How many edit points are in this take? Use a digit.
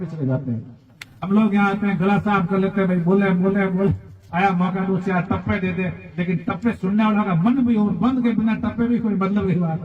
1